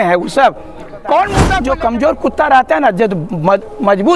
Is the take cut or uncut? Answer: cut